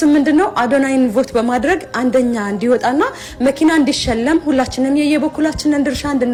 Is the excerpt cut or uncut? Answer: uncut